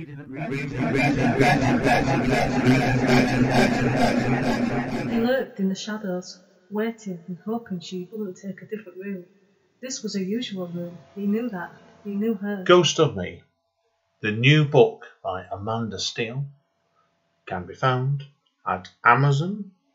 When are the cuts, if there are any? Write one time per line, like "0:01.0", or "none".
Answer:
0:05.1
0:12.6

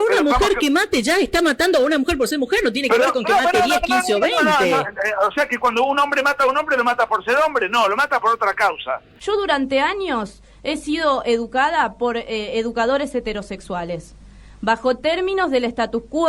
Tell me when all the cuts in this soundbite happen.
0:09.1

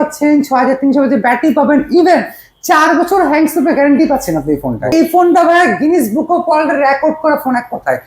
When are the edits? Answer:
0:04.9

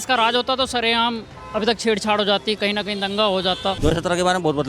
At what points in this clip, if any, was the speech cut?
0:03.8

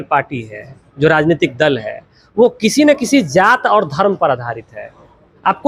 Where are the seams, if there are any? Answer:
none

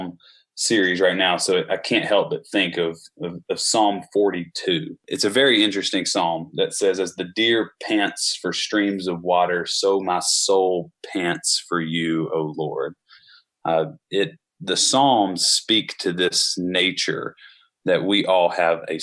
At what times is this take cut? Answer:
0:05.1

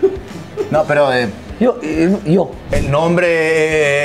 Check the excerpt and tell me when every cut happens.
0:01.4
0:02.7

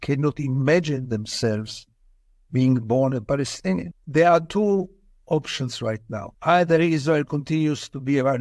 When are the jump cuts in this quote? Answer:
0:04.0
0:06.3

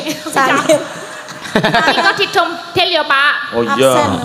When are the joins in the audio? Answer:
none

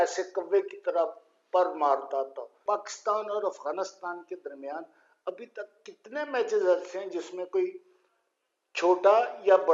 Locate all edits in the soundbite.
0:02.5

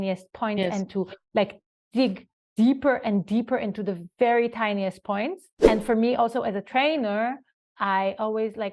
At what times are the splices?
0:05.5

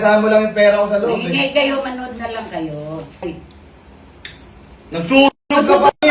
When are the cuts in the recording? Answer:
0:03.2

